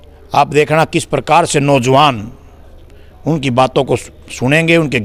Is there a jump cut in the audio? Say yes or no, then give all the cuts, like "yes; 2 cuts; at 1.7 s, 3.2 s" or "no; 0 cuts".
no; 0 cuts